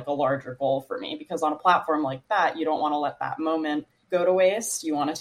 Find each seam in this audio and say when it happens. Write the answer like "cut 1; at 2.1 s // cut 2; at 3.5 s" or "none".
cut 1; at 3.9 s